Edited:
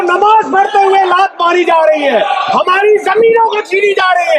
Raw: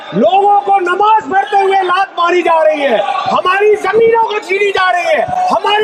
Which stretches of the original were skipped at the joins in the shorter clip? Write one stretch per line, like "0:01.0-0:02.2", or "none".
none